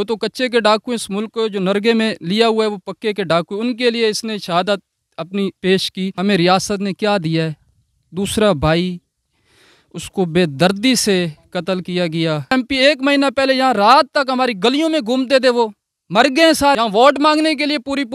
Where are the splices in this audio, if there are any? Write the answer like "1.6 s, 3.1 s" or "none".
6.1 s, 12.5 s, 16.8 s